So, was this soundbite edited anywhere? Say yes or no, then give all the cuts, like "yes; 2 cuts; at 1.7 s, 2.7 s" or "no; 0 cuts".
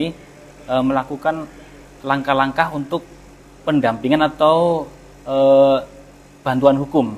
no; 0 cuts